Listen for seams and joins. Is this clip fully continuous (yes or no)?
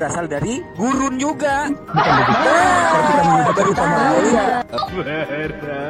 yes